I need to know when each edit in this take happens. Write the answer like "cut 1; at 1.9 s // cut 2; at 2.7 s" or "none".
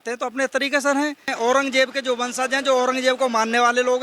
cut 1; at 1.3 s